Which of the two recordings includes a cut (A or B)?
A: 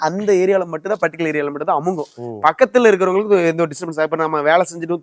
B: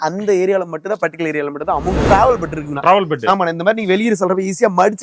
B